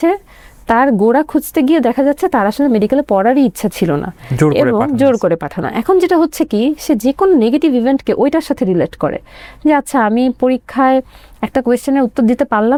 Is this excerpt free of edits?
yes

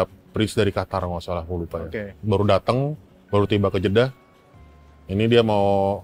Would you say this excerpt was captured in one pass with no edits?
yes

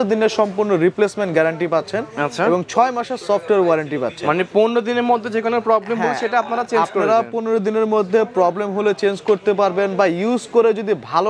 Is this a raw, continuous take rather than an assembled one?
yes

